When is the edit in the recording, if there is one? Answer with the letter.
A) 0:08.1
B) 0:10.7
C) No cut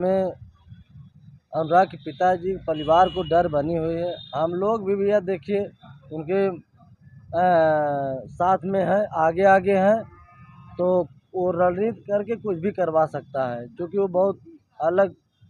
C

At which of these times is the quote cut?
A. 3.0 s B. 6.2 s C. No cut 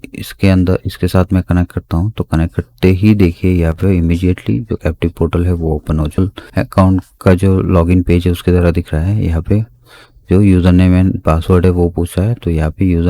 B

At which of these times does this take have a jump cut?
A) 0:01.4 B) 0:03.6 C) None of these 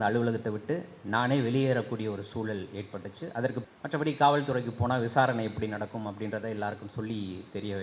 B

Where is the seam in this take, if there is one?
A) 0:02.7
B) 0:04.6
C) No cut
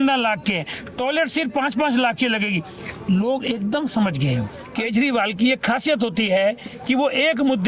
B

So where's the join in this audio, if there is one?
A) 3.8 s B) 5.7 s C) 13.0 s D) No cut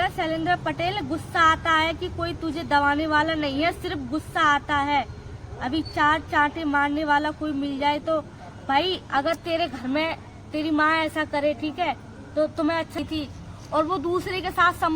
C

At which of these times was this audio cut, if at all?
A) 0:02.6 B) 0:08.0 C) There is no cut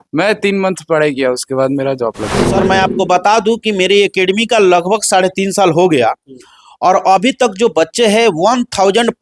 A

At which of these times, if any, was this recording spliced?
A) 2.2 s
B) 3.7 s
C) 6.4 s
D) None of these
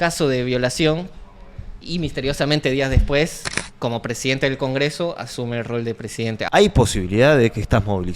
C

